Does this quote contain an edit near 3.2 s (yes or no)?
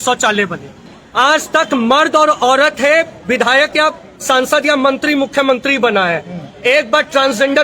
no